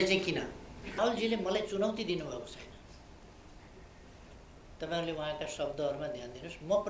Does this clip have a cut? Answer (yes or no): yes